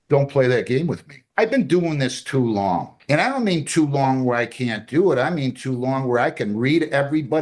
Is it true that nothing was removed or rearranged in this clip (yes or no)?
no